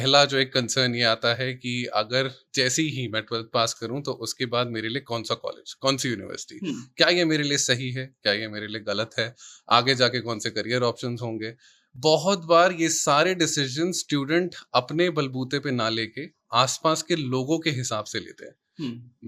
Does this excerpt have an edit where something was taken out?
no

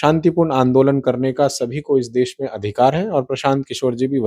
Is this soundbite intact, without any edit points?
yes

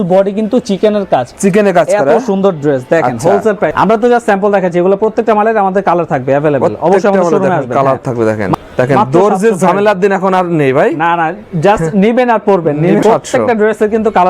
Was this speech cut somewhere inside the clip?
yes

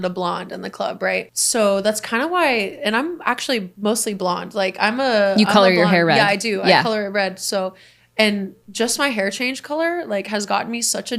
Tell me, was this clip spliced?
yes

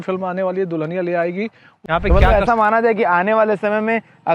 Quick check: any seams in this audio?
yes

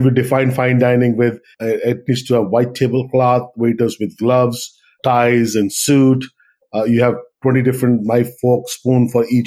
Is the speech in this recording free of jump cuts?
no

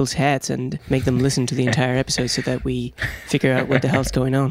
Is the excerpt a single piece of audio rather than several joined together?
yes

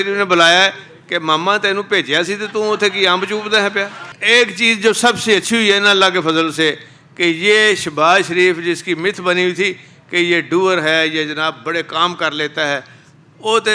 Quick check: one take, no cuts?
no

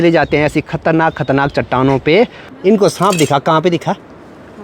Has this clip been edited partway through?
yes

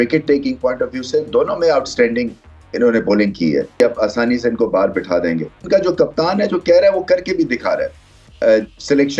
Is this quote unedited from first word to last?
no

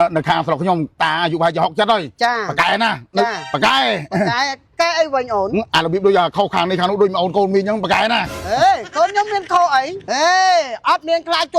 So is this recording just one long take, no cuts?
no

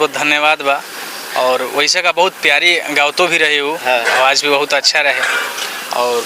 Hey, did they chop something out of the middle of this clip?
no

